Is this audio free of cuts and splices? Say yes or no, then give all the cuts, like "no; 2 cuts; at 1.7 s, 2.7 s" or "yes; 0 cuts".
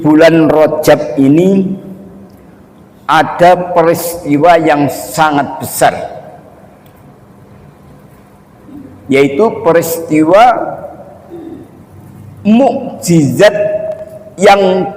yes; 0 cuts